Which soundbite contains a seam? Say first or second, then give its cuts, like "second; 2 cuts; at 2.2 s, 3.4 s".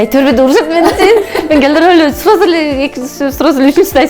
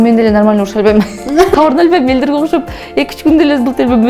second; 1 cut; at 1.5 s